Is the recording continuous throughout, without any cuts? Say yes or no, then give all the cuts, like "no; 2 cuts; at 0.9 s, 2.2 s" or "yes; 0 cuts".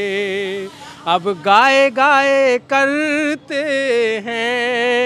yes; 0 cuts